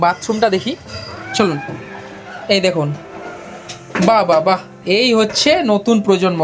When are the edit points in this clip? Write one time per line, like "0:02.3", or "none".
none